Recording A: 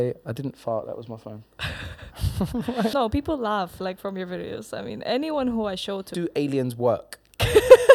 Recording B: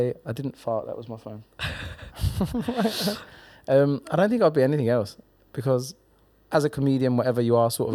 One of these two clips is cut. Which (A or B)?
A